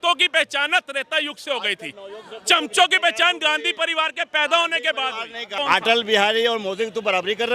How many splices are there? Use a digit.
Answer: 1